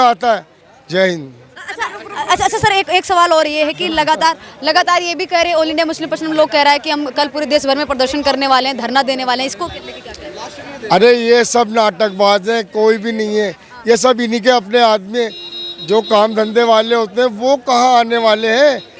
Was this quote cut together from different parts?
no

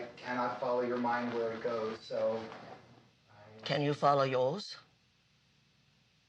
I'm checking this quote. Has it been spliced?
yes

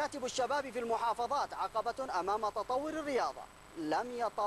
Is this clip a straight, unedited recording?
yes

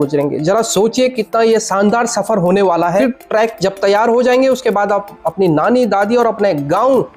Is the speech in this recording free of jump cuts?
no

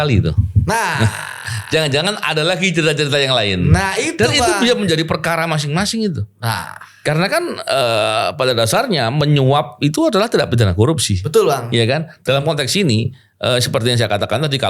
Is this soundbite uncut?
yes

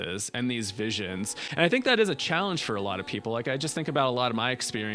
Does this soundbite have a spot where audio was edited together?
no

